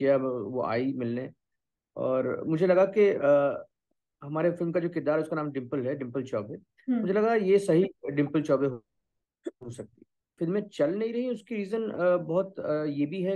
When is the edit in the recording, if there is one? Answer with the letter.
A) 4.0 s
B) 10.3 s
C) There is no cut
B